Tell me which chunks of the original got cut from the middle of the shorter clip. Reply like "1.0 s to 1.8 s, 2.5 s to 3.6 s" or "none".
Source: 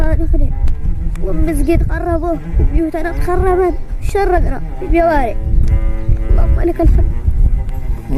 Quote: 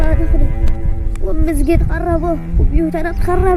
none